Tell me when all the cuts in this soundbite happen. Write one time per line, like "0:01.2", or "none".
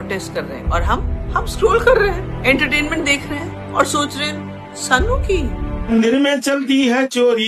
0:05.7

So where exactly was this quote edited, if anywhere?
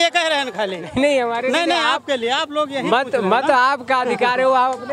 none

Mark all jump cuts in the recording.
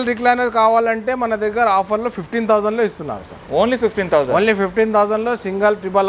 none

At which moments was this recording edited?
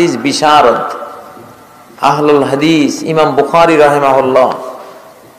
none

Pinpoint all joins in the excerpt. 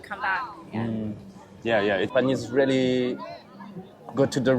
0:02.1

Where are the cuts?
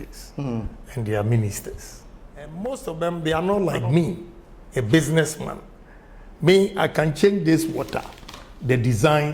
0:02.5

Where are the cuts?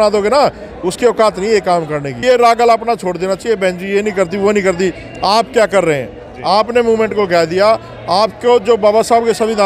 0:02.2

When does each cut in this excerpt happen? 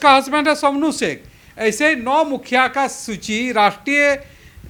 none

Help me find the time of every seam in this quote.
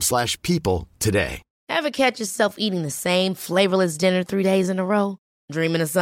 0:01.5

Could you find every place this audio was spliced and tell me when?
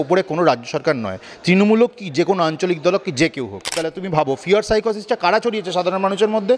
0:03.9

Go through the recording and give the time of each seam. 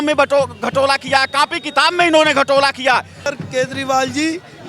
0:03.2

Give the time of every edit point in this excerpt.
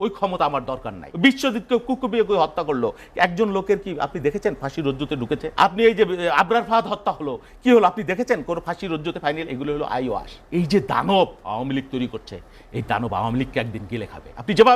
0:01.0
0:05.5
0:10.3

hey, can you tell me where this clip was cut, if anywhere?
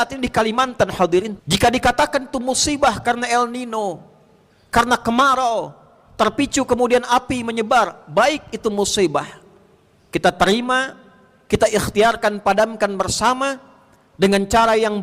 0:01.4

